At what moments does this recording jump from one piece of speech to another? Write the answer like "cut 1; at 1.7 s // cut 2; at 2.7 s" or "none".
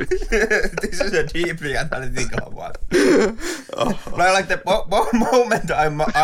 cut 1; at 2.8 s